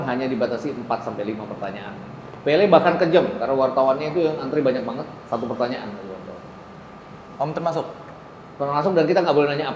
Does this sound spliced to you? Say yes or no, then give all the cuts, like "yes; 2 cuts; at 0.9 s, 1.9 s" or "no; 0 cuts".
no; 0 cuts